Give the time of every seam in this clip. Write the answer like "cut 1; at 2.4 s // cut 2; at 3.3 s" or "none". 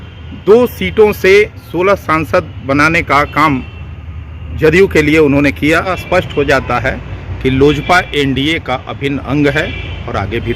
cut 1; at 6.0 s